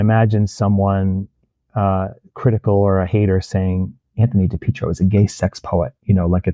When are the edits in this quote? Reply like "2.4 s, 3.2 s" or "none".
none

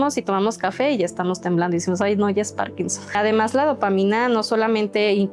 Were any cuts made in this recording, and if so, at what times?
3.1 s

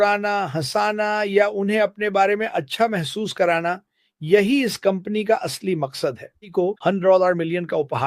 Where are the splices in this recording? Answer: 6.4 s

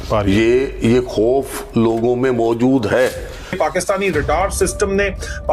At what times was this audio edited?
3.5 s

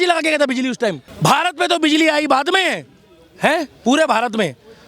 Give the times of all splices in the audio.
1.1 s

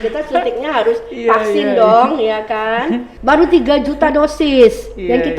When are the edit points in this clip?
3.1 s

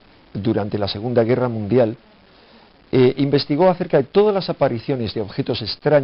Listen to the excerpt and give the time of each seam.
3.8 s

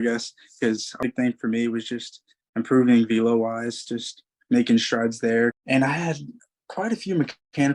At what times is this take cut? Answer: 1.0 s, 5.6 s

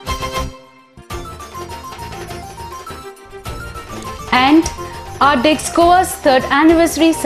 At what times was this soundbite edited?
2.8 s

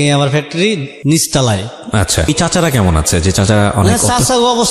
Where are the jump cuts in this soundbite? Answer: 2.3 s

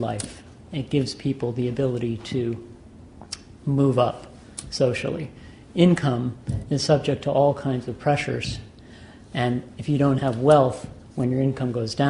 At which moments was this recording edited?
4.9 s

